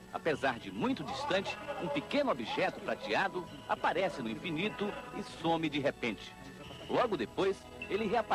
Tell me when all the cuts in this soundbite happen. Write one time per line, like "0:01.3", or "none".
0:06.7

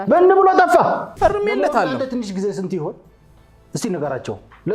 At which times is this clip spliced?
0:01.1

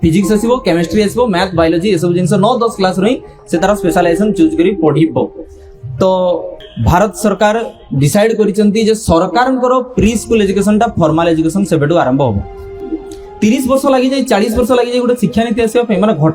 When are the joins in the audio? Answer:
0:06.5
0:12.9

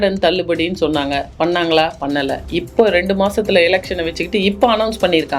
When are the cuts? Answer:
none

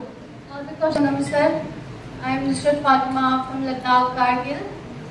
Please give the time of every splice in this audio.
none

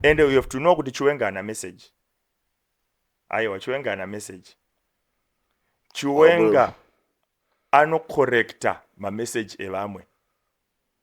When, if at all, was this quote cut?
none

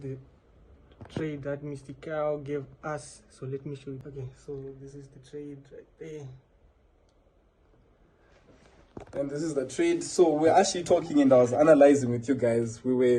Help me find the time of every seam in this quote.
none

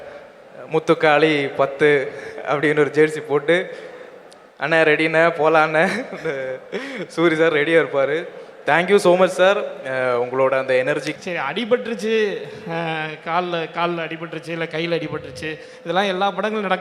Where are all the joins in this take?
0:11.1

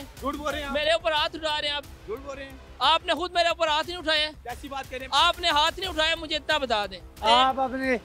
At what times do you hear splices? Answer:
0:07.1

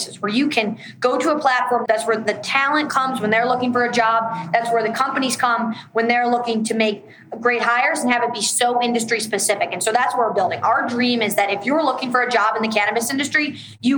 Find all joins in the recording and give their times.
none

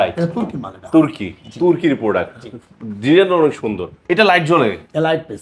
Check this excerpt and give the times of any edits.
0:03.9

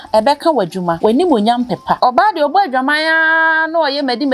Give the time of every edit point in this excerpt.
0:00.9
0:02.0

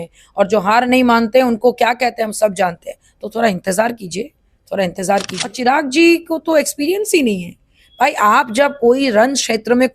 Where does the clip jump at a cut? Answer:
0:05.4

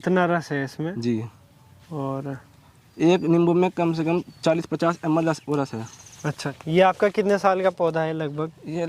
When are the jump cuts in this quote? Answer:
0:06.5

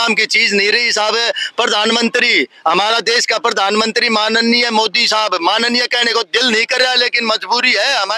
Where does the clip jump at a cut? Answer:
none

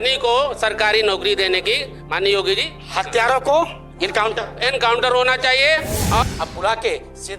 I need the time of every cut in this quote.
0:06.2

